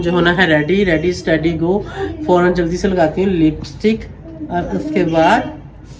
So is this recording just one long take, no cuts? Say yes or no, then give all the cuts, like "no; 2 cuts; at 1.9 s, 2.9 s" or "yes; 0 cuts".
yes; 0 cuts